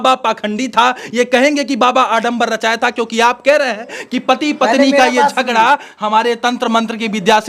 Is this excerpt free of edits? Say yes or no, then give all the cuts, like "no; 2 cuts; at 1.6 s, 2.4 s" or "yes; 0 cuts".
yes; 0 cuts